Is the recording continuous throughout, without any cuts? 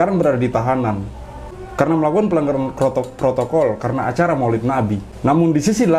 no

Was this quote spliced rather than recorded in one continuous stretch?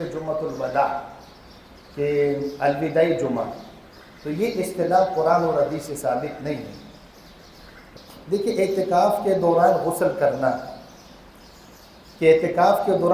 yes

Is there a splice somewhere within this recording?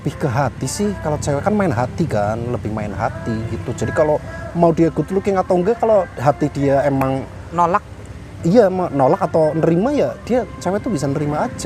no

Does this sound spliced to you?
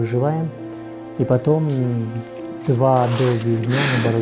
no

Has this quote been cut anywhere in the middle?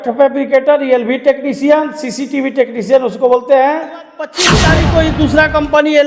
yes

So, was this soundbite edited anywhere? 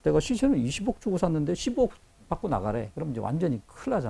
yes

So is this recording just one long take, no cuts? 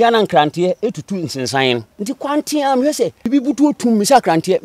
no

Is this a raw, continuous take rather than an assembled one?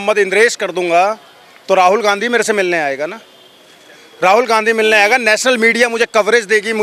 yes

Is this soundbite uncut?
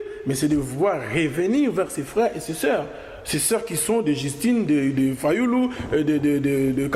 yes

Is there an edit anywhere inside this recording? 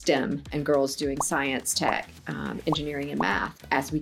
no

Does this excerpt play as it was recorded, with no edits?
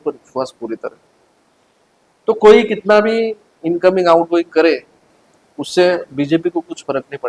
yes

